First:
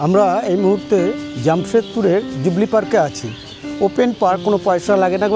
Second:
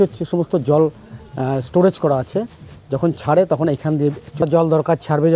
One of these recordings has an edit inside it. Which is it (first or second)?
second